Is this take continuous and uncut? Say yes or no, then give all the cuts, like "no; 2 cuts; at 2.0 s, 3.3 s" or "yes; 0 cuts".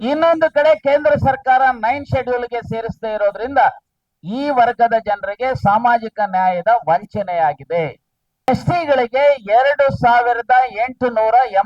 no; 1 cut; at 8.5 s